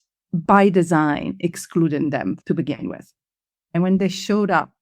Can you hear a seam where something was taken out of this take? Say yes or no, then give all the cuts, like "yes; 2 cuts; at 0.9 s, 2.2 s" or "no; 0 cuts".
yes; 2 cuts; at 2.4 s, 3.7 s